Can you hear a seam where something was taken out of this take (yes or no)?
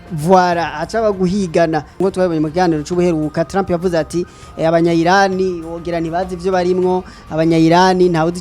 yes